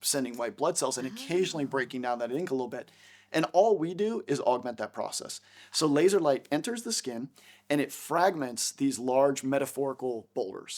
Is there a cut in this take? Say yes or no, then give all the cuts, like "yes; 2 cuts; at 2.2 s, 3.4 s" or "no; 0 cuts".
no; 0 cuts